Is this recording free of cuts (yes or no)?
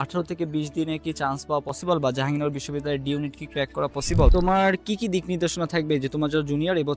no